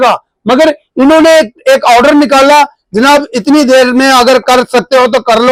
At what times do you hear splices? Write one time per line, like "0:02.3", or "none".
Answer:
none